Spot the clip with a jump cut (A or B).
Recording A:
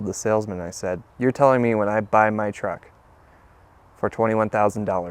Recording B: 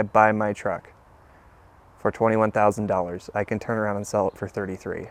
A